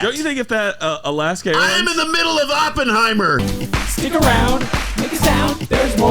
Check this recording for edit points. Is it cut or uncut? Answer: cut